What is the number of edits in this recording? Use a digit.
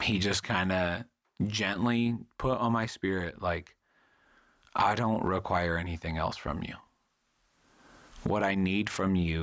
0